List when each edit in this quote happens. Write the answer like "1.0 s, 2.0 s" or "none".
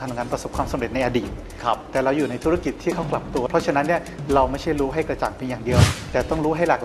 1.4 s, 3.5 s